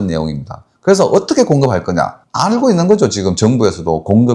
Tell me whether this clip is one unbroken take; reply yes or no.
no